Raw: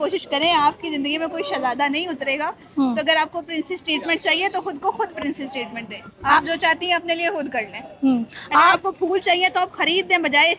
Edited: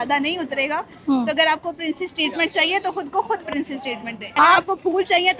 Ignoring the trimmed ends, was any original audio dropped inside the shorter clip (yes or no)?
yes